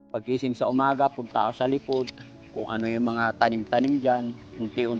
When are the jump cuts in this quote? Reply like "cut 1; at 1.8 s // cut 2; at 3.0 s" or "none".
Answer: none

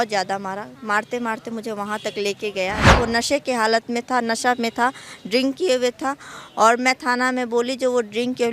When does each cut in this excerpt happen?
cut 1; at 2.9 s

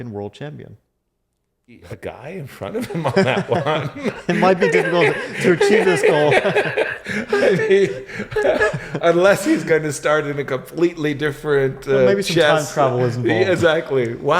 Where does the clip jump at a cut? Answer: cut 1; at 1.8 s

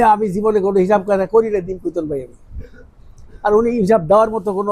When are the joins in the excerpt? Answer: none

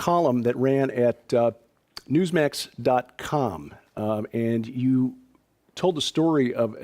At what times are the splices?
cut 1; at 5.4 s

